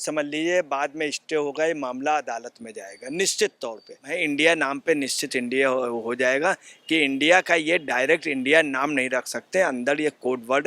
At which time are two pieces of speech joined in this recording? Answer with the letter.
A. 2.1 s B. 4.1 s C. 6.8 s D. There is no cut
B